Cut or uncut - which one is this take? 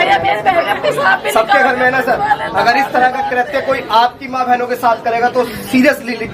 uncut